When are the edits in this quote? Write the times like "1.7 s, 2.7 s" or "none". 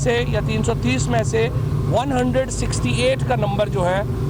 none